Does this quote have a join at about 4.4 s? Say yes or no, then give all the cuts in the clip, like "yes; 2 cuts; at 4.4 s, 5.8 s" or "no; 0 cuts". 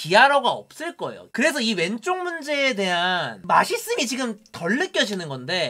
no; 1 cut; at 1.3 s